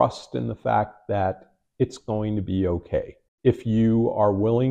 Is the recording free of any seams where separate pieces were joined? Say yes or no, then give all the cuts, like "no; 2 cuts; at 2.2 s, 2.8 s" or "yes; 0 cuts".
yes; 0 cuts